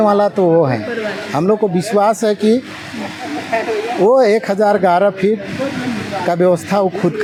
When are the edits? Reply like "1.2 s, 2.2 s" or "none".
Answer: none